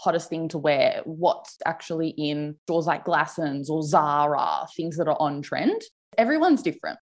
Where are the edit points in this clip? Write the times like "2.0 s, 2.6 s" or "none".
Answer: 6.1 s